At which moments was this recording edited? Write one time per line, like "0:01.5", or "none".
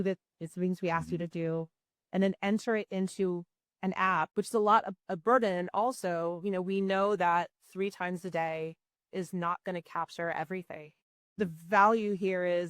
0:04.3
0:11.4